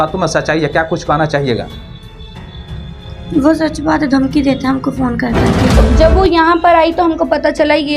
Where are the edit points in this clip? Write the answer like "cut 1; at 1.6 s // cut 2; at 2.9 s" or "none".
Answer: cut 1; at 5.8 s